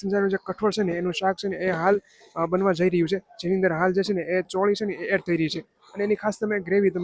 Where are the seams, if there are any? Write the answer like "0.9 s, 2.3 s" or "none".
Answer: none